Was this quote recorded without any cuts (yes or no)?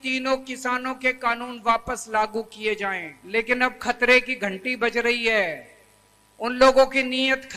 no